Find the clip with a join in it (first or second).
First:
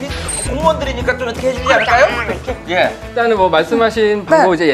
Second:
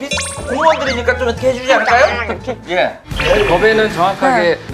second